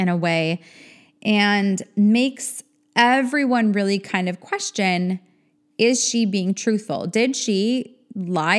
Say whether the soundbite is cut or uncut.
uncut